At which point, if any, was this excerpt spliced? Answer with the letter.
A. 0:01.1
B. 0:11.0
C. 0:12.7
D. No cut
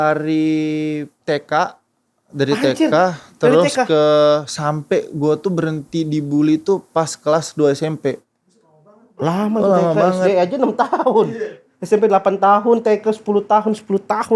A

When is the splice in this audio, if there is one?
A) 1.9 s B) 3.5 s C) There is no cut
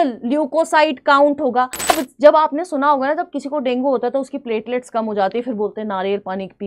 A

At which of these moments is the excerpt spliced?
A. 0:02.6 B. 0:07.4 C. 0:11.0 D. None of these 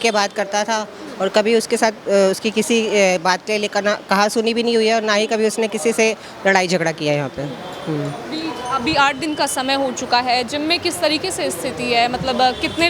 D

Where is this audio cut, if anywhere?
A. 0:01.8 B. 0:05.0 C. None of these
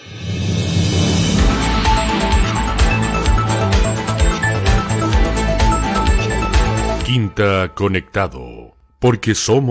C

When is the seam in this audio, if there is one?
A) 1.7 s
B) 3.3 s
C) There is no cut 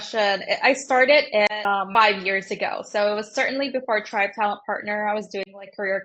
A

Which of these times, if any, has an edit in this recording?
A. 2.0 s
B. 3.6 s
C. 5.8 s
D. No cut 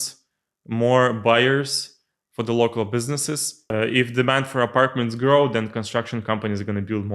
B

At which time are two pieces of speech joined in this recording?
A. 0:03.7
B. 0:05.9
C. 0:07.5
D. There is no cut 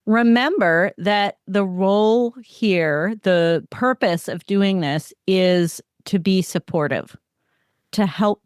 A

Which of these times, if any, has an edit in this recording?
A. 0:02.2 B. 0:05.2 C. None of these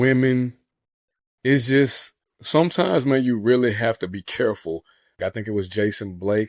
B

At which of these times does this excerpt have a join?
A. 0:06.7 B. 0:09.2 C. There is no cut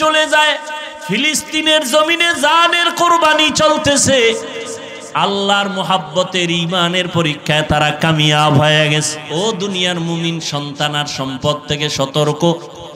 B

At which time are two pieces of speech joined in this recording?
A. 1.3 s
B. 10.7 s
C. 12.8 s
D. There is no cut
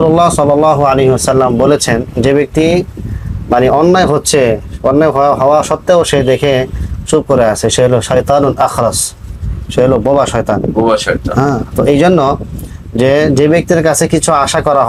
D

